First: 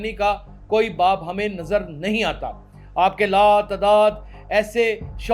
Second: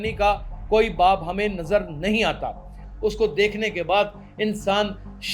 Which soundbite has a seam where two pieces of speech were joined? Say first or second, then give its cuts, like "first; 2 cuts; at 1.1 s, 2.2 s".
second; 1 cut; at 2.8 s